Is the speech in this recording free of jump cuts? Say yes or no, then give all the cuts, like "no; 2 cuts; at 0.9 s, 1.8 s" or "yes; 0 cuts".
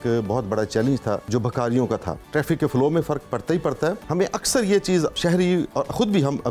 no; 4 cuts; at 1.2 s, 2.2 s, 4.0 s, 5.2 s